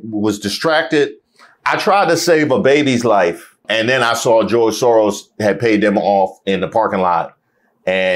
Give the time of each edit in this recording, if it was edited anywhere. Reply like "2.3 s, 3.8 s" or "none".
3.6 s